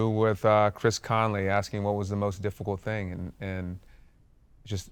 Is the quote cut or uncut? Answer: uncut